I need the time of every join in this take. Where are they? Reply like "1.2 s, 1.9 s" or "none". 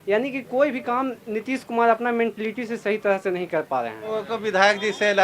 4.1 s